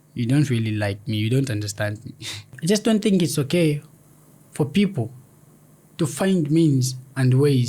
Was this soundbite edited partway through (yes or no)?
yes